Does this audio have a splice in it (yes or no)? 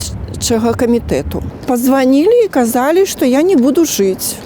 yes